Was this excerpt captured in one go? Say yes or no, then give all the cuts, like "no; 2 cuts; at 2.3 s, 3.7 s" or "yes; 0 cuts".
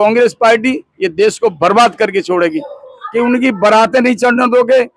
no; 1 cut; at 3.0 s